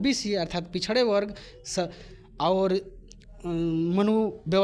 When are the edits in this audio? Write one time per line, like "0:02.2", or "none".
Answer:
none